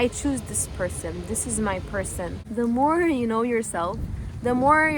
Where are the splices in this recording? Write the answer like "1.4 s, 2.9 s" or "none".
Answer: 2.4 s